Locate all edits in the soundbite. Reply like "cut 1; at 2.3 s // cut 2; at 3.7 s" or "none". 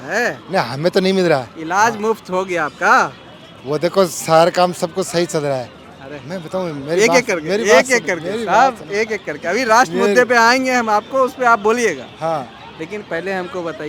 none